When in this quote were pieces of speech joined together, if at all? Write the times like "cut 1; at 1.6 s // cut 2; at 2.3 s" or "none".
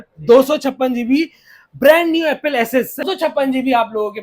cut 1; at 3.1 s